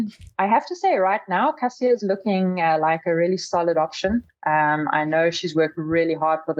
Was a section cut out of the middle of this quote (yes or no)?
no